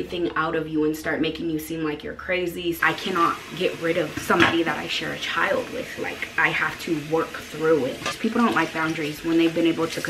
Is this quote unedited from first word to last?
no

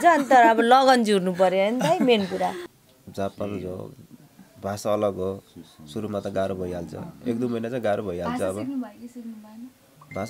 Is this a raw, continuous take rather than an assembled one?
no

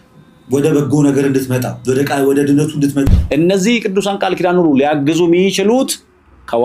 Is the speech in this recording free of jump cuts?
no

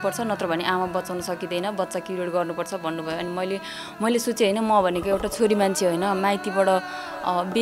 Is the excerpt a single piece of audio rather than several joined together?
yes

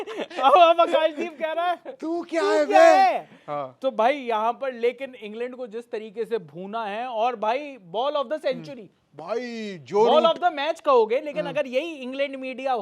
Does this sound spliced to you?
no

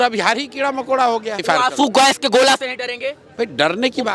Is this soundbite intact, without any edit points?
no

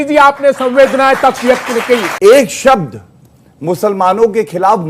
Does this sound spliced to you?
yes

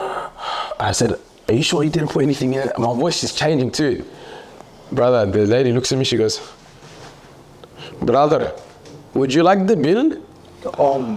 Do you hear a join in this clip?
no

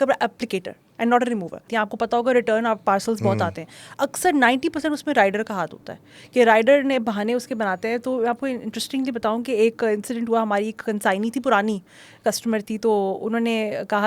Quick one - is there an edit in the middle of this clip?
yes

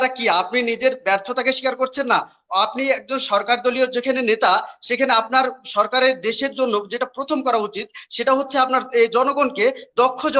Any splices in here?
no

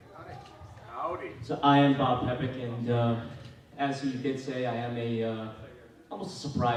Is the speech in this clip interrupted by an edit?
no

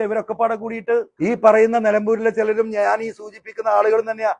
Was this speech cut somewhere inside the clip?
yes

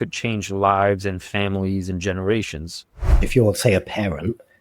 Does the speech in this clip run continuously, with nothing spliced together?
no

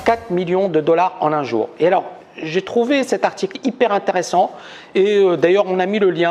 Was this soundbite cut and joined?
yes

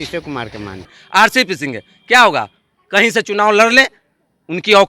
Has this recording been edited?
yes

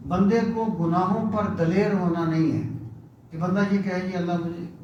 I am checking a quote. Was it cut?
no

